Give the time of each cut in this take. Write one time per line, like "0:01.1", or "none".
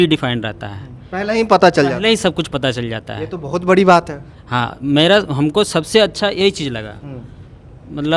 none